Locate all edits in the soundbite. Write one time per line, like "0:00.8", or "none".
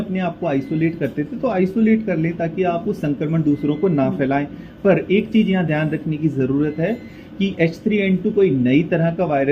none